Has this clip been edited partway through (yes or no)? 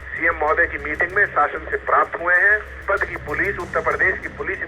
yes